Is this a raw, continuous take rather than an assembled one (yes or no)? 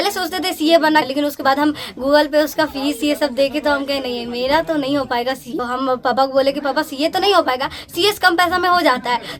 no